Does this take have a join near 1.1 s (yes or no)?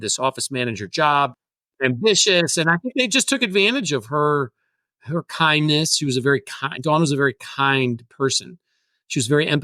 yes